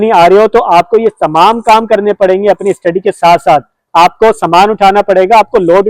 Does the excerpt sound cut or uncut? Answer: cut